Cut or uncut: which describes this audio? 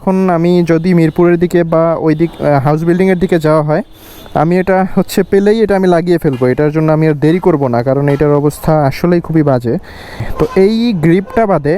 cut